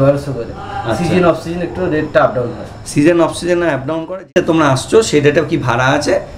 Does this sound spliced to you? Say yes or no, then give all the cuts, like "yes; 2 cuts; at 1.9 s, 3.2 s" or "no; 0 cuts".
no; 0 cuts